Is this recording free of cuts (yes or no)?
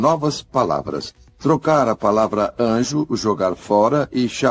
yes